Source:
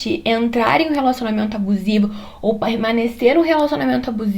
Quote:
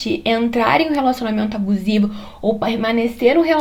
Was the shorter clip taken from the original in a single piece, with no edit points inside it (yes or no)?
yes